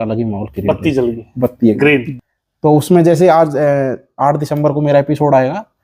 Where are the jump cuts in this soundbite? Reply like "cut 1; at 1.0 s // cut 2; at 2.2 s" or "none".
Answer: cut 1; at 2.1 s